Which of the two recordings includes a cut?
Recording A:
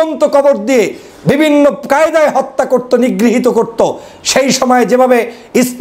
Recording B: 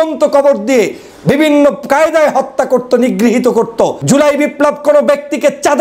B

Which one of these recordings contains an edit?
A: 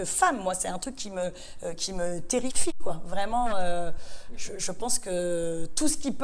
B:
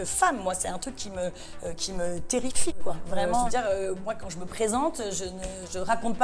B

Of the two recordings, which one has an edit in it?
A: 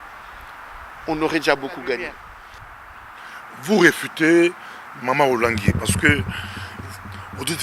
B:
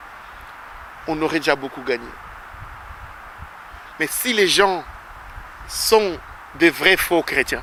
A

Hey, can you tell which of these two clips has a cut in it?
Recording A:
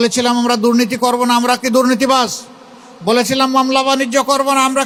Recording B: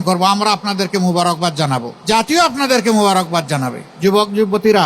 B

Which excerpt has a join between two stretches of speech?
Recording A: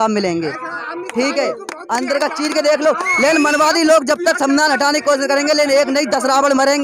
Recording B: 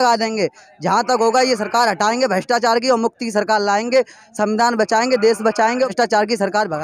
B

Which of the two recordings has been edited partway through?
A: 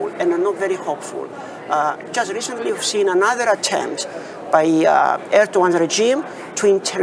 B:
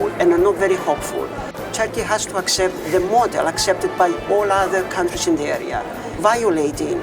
B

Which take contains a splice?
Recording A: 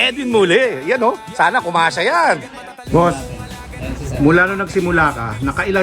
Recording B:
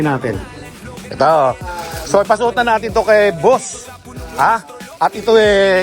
A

